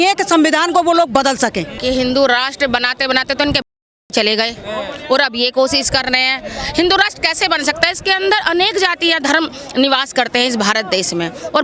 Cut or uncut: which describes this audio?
cut